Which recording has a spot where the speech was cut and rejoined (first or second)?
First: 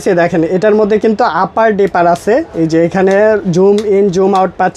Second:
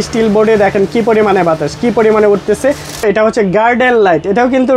second